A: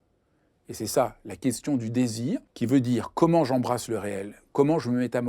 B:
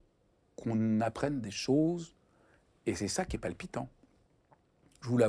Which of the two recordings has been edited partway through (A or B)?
A